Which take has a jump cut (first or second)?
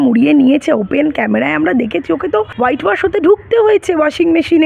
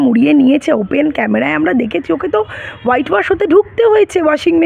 first